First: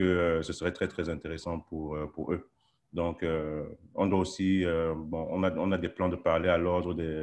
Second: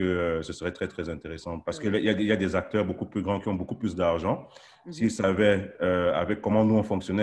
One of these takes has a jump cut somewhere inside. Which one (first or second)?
second